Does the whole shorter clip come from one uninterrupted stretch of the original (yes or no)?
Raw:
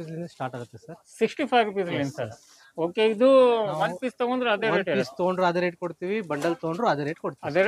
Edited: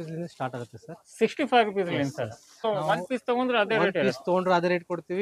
no